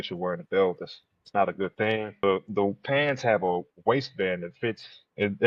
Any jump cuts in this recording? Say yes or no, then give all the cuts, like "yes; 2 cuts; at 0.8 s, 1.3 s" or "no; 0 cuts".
yes; 1 cut; at 2.2 s